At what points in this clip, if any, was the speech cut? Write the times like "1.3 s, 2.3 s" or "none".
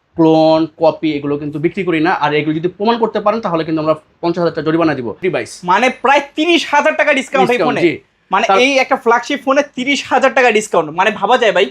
5.1 s